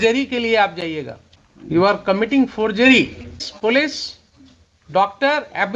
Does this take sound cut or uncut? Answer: cut